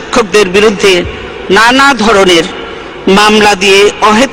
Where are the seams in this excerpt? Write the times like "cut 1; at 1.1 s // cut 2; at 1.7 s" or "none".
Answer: none